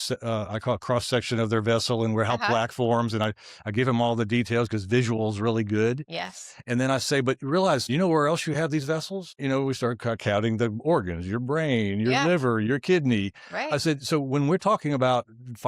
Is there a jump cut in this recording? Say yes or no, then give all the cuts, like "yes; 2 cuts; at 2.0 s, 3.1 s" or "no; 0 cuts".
yes; 2 cuts; at 7.9 s, 9.3 s